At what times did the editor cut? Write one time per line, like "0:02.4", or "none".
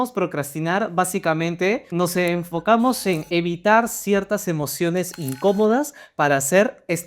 0:01.9